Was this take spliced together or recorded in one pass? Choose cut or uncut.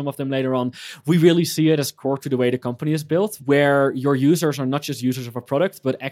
cut